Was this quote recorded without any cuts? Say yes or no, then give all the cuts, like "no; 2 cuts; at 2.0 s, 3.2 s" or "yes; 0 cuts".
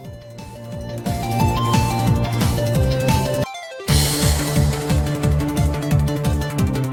yes; 0 cuts